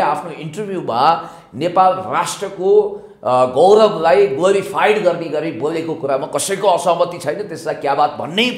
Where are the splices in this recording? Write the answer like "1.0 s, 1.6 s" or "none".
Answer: none